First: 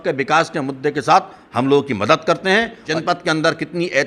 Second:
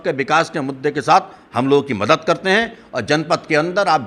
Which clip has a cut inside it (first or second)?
first